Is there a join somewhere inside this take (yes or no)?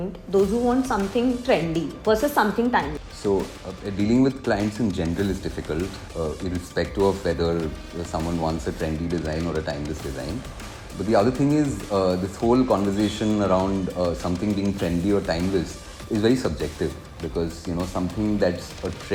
no